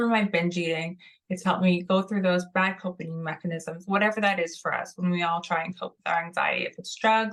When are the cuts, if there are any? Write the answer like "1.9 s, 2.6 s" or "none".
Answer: none